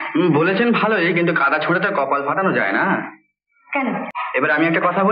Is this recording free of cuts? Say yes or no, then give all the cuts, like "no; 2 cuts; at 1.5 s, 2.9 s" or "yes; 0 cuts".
no; 1 cut; at 4.1 s